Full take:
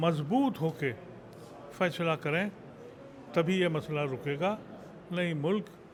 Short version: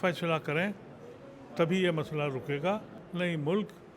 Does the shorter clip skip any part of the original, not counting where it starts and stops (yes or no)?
yes